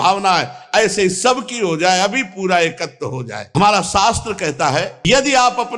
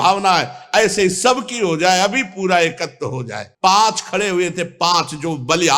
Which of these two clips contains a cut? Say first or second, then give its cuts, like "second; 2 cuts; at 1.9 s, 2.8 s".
second; 1 cut; at 3.4 s